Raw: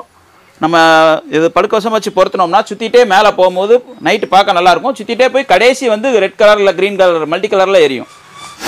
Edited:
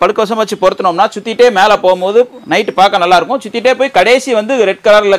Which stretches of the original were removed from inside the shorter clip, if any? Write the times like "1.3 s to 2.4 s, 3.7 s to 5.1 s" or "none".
none